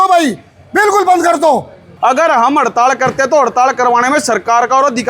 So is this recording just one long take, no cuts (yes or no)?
no